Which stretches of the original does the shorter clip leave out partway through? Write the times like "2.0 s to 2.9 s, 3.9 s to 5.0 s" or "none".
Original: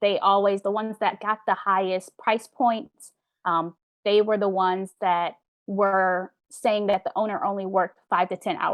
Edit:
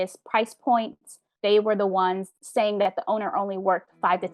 3.1 s to 3.8 s, 4.9 s to 6.4 s